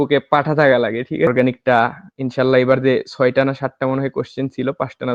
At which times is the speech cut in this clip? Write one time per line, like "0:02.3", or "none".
0:01.3